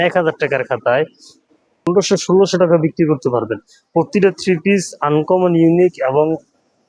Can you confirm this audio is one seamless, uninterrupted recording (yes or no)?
no